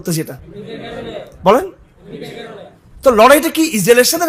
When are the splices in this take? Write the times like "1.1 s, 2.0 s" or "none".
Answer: none

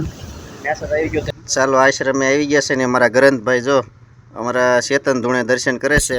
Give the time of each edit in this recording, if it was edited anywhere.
1.3 s

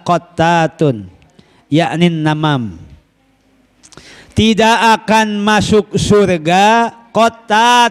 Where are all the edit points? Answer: none

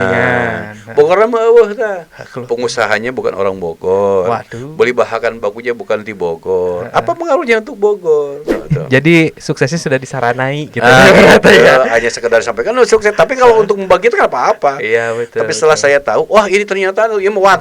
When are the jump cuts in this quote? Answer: 8.6 s

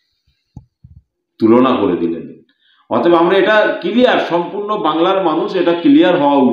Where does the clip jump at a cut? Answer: none

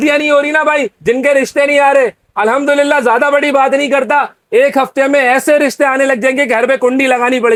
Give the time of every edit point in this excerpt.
none

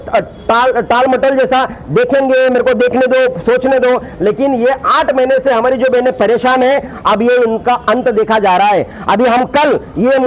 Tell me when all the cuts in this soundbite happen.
none

